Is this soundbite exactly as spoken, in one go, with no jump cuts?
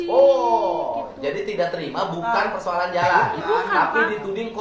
yes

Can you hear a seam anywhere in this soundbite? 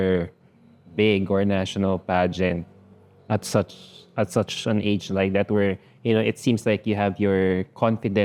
no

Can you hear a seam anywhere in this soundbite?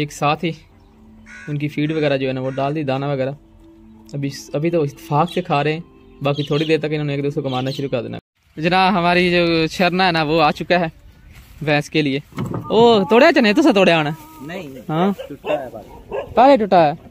yes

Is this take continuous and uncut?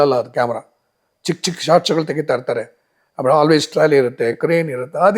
yes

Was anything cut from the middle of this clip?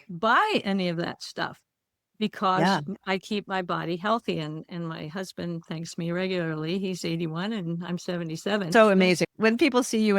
yes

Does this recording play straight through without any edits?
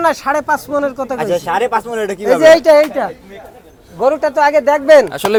yes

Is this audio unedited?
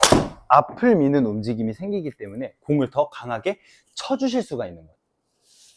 no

